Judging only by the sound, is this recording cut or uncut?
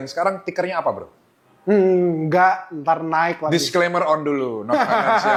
uncut